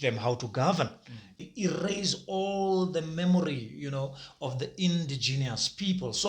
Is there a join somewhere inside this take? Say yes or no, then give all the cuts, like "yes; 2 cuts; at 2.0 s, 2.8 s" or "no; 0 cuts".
yes; 1 cut; at 1.4 s